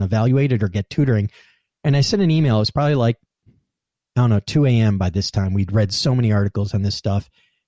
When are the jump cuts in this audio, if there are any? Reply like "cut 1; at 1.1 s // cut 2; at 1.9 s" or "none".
none